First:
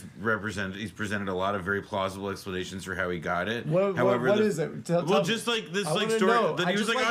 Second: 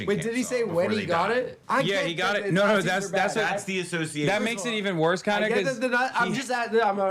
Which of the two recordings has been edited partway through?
second; 1 cut; at 1.6 s

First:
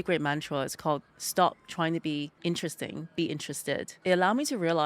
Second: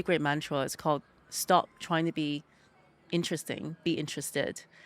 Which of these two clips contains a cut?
first; 3 cuts; at 1.2 s, 2.3 s, 3.9 s

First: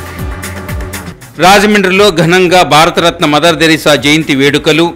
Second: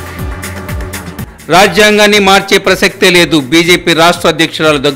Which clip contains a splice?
first; 1 cut; at 1.0 s

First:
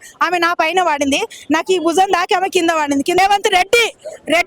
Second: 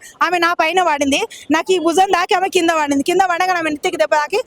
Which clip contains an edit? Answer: first; 1 cut; at 3.1 s

